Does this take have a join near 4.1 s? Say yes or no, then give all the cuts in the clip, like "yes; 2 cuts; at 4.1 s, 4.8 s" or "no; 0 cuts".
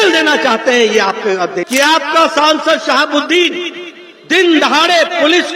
no; 1 cut; at 1.7 s